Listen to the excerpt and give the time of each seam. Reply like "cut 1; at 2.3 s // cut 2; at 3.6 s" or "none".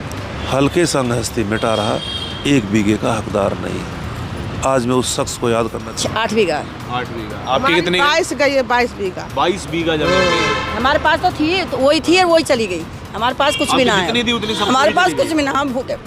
cut 1; at 5.8 s